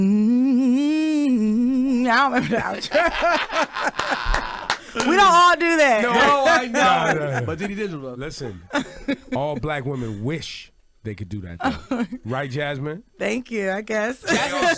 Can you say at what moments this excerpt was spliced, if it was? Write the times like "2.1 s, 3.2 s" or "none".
none